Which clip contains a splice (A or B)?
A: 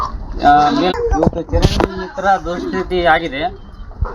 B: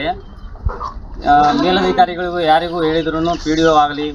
A